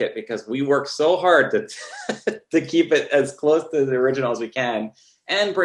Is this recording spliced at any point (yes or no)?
no